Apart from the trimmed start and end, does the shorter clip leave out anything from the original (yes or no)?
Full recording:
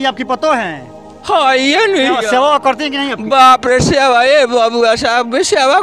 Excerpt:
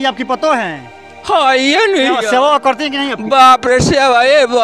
no